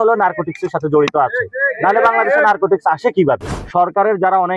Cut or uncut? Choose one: cut